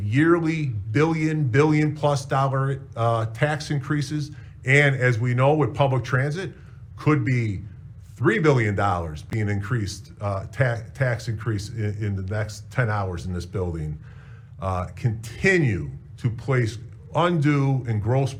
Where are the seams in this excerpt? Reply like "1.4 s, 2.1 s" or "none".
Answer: none